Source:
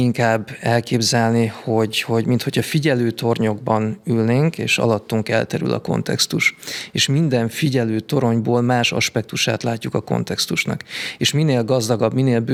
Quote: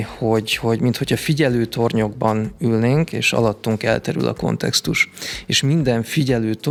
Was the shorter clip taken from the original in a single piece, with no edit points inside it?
yes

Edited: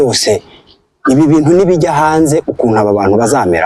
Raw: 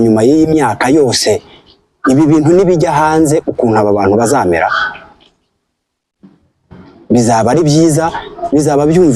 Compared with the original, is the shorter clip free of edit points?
yes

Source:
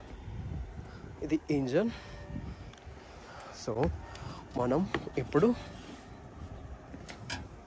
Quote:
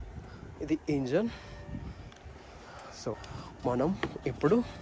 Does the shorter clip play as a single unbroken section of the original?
no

